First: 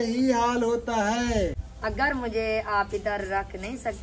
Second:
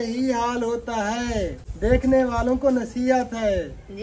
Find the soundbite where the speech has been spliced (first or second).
first